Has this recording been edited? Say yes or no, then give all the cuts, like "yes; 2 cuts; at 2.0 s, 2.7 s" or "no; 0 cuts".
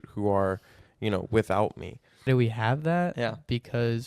yes; 1 cut; at 2.3 s